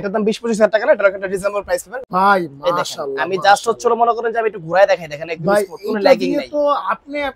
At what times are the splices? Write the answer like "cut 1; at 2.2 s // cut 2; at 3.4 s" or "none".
cut 1; at 2.0 s